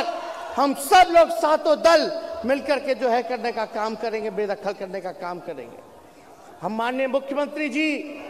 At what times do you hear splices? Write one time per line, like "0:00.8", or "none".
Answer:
none